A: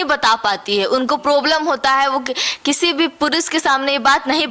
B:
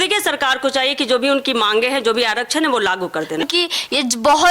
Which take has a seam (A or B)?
B